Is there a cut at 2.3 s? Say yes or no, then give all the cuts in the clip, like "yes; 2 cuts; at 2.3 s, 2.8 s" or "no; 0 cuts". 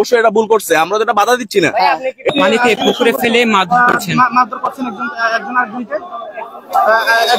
yes; 1 cut; at 2.3 s